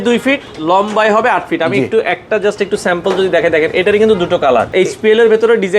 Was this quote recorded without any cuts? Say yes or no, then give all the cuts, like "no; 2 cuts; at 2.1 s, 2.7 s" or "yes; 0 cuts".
no; 1 cut; at 4.7 s